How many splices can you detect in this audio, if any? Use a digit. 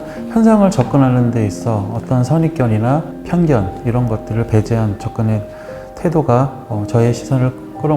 1